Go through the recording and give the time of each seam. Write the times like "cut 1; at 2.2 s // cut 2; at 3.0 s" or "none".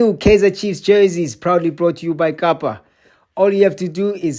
none